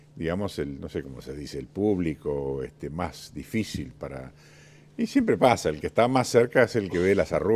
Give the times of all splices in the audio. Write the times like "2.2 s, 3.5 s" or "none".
1.8 s